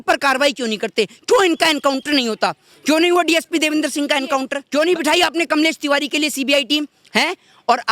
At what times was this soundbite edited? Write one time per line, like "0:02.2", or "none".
0:04.6